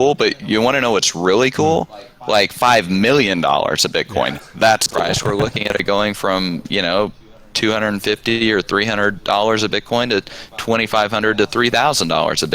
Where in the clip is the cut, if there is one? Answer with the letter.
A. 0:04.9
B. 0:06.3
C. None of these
A